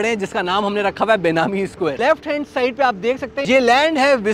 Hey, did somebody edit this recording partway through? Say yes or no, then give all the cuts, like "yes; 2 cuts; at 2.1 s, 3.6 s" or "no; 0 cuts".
yes; 2 cuts; at 2.0 s, 3.4 s